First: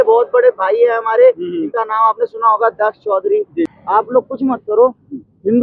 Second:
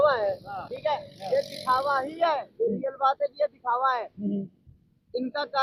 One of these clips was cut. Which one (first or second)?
first